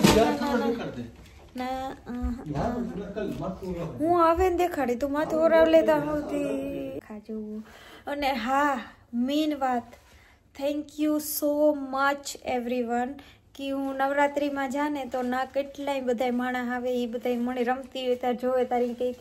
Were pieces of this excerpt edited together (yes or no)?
yes